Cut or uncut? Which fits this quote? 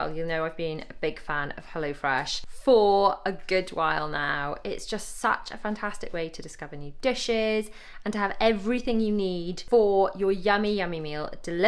cut